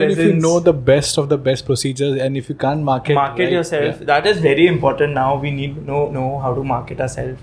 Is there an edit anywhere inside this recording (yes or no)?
no